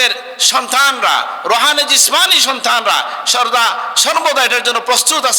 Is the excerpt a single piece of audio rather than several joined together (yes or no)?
yes